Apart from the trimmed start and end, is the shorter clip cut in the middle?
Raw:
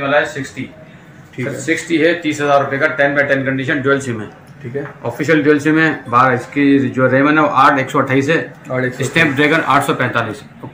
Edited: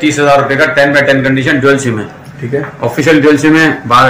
no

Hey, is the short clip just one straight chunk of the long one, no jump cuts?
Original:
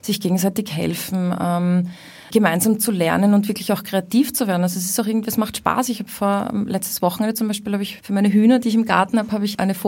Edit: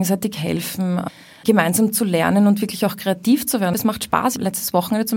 no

